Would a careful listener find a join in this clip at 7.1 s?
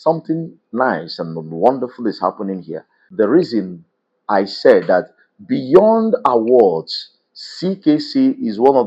no; 1 cut; at 3.1 s

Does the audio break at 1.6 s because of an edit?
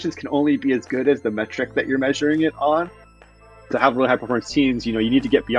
no; 1 cut; at 3.2 s

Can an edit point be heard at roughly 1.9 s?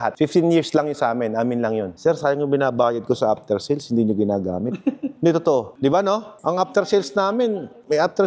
yes; 1 cut; at 1.9 s

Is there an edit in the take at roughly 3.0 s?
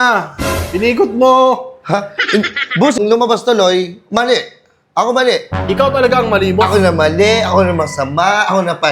yes; 1 cut; at 3.0 s

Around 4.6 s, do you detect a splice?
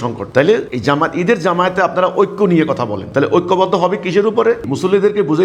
yes; 2 cuts; at 3.0 s, 4.6 s

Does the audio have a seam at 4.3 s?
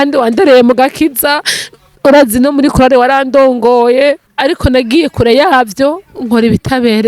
yes; 1 cut; at 4.3 s

